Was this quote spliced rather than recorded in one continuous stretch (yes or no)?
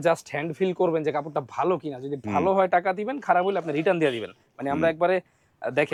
no